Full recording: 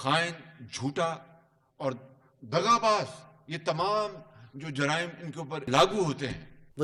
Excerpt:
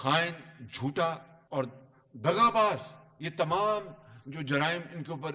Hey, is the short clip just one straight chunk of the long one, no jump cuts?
no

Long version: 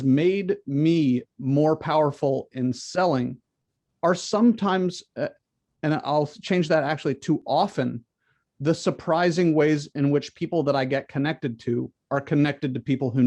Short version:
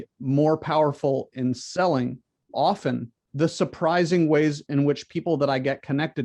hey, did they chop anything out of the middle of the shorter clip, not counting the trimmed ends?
yes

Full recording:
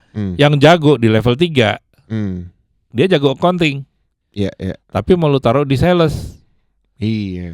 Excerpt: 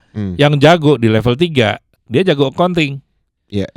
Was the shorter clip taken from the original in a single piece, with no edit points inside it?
no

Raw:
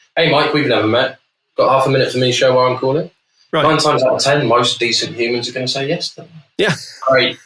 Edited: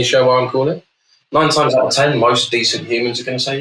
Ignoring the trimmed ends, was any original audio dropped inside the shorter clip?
no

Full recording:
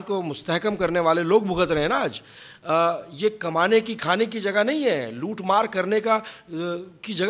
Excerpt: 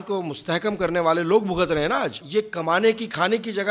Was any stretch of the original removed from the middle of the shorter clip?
yes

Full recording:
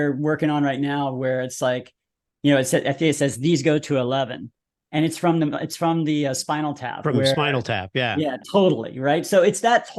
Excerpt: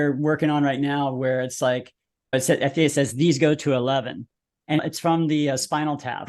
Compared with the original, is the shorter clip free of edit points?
no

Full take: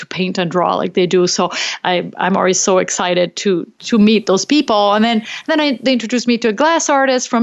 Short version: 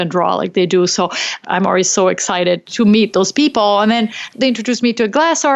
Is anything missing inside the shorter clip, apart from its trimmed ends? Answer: yes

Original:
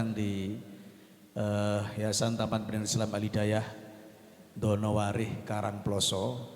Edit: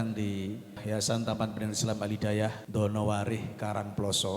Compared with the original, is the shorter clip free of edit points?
no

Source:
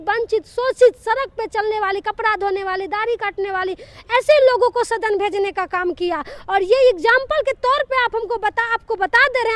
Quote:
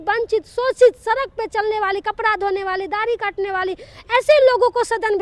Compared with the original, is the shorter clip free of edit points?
yes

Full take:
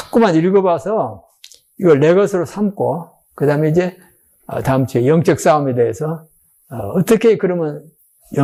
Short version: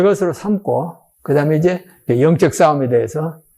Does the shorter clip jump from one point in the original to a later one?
yes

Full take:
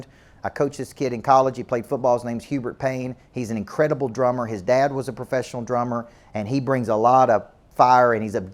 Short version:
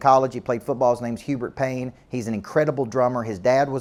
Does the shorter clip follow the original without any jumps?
yes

